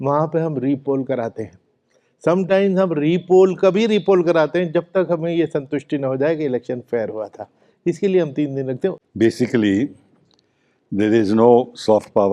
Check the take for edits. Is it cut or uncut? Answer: cut